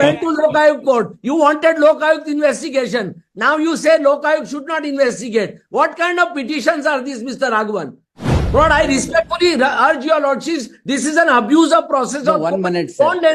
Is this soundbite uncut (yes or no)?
yes